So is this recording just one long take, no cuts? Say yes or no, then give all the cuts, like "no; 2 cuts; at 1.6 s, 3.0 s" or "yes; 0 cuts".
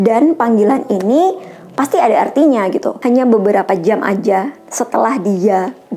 no; 1 cut; at 2.8 s